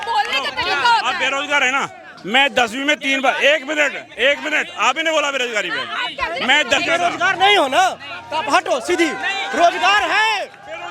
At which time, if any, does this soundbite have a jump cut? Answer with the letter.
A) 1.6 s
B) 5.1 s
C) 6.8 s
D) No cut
C